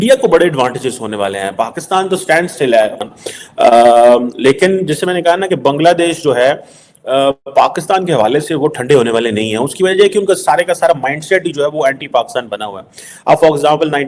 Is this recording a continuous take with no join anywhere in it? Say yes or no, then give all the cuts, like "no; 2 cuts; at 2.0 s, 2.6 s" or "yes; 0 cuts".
no; 1 cut; at 3.0 s